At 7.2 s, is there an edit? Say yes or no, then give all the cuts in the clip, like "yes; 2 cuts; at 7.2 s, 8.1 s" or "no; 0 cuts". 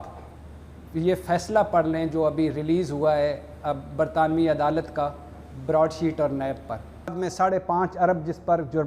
yes; 1 cut; at 7.2 s